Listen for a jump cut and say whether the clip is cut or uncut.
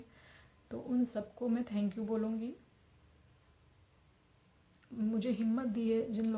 uncut